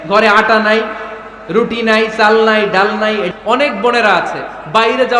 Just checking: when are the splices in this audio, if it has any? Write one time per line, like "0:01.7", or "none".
0:03.3

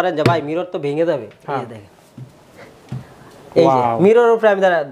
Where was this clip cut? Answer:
none

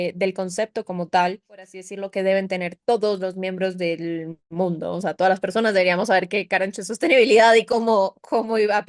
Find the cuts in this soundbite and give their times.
0:02.0

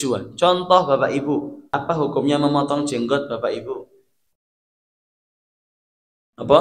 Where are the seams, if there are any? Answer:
0:01.6

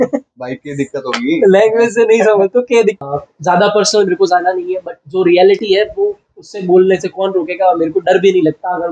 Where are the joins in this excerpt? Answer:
0:03.0

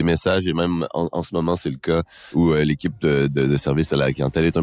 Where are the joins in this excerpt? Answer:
0:02.3

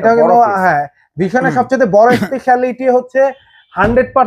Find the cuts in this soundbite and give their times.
none

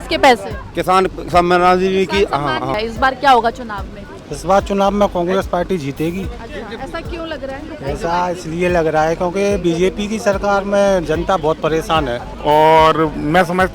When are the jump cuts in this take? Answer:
0:02.8
0:12.3

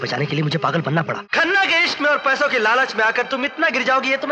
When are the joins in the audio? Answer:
0:01.2

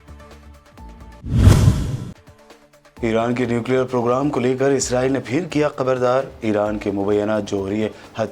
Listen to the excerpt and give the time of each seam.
0:01.0

